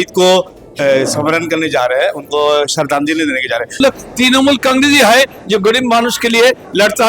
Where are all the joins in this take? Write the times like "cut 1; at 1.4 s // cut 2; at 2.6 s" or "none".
cut 1; at 3.8 s